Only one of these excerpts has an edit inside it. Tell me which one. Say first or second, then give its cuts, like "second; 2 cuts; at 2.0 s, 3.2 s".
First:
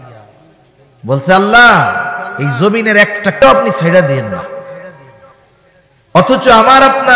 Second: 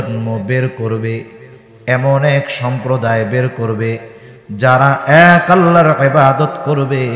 first; 1 cut; at 3.4 s